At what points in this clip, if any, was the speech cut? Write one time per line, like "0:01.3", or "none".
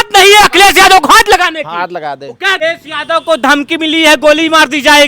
0:02.6